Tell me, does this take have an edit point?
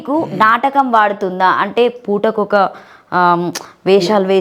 no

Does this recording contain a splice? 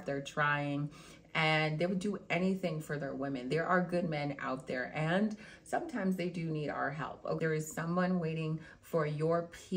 yes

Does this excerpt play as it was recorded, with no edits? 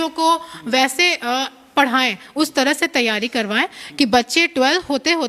yes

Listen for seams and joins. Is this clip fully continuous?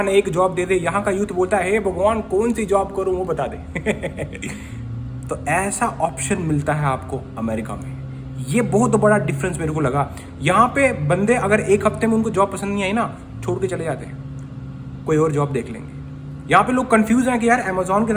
yes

